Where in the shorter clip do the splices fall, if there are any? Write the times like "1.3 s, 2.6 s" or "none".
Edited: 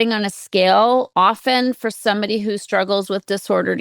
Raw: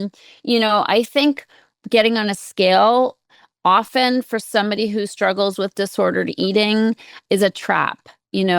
1.1 s